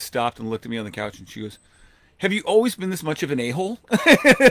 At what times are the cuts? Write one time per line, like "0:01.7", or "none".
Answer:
none